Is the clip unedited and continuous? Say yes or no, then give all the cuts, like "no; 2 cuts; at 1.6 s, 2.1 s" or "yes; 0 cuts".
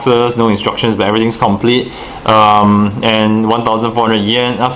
no; 1 cut; at 1.5 s